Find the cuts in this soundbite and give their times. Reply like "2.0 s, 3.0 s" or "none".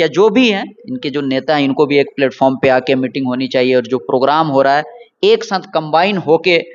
none